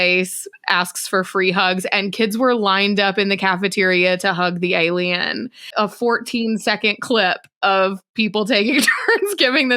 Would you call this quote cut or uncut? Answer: cut